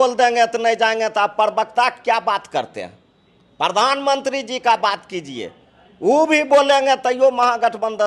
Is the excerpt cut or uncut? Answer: uncut